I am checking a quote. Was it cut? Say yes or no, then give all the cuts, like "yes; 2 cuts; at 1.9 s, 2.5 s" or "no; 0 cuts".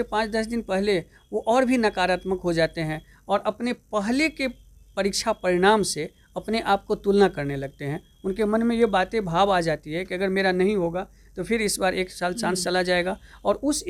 no; 0 cuts